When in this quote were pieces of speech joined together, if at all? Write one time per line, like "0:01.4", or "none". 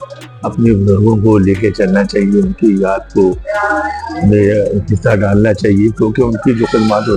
none